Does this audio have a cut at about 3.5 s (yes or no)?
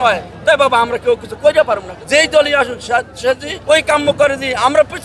yes